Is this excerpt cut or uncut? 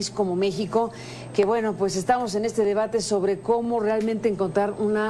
uncut